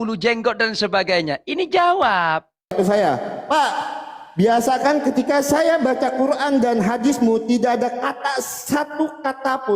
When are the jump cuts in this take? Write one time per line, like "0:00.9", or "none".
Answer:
0:02.7